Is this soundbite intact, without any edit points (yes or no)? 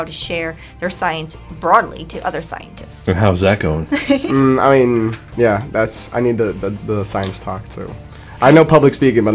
no